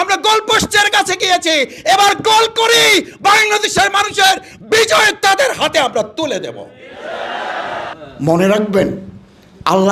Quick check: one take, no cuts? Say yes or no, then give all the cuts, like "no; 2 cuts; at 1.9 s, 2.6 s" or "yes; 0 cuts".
no; 1 cut; at 8.0 s